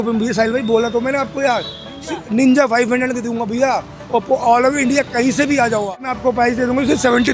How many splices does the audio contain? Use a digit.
1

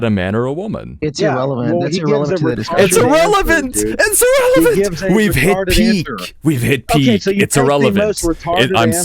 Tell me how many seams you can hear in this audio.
1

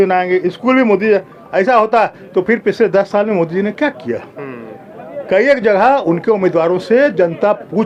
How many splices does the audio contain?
0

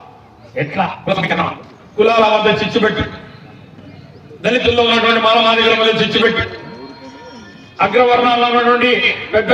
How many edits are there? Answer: 1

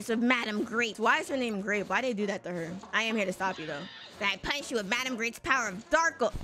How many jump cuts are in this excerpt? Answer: 2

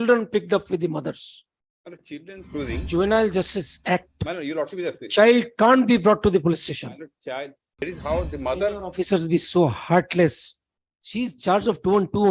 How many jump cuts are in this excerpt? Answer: 2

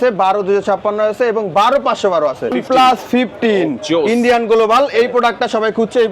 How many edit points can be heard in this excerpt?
1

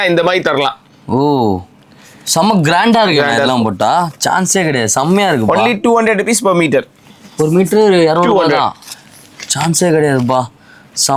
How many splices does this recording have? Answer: 0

